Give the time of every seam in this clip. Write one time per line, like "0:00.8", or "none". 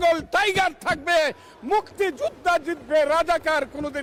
none

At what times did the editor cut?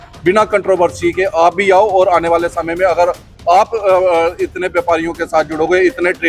none

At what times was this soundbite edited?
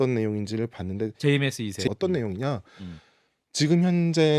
0:01.9

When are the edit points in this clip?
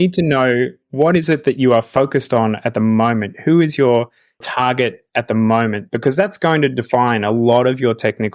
none

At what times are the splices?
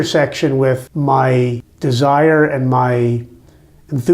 0:00.9
0:01.7

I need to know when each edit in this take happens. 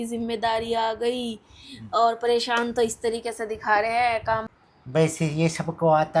0:04.5

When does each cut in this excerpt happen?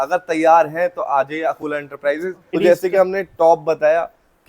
0:02.5

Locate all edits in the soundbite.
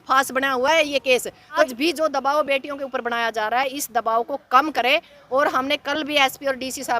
0:01.7

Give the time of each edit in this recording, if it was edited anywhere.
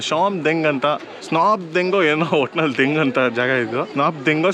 none

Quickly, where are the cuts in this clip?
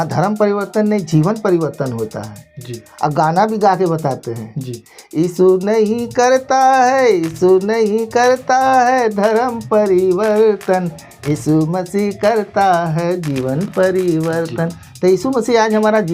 none

